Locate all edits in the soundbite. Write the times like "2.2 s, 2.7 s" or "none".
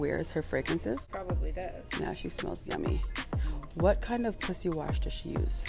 none

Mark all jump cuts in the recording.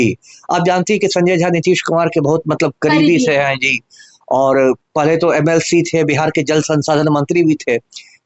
none

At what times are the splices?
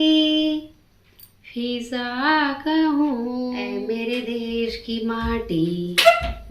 3.6 s

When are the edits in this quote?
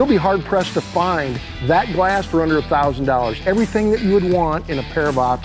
3.4 s

